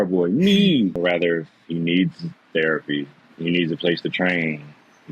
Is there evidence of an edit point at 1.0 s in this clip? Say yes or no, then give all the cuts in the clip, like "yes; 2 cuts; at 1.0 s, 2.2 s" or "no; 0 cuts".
yes; 1 cut; at 1.0 s